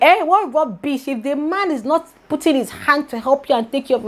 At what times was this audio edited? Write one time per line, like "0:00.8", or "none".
none